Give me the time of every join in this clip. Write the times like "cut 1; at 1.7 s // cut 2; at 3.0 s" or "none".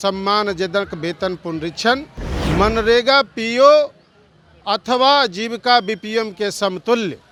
none